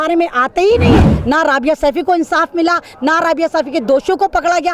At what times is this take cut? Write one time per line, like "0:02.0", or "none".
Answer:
0:01.1